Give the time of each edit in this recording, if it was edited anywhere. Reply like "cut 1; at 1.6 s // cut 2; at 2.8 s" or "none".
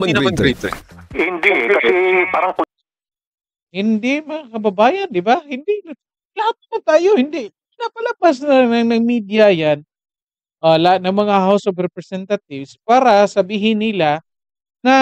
none